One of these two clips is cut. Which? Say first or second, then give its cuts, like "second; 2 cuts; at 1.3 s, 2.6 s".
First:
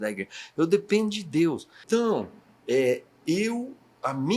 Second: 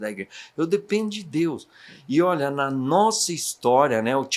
first; 1 cut; at 1.8 s